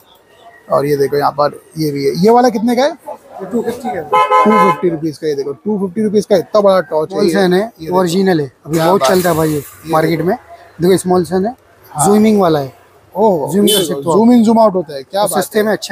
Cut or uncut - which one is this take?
uncut